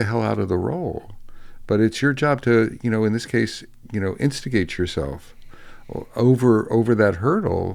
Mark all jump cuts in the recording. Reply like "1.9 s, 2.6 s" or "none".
none